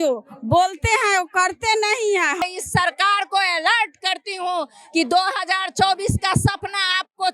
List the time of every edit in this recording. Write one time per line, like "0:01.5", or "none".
0:02.4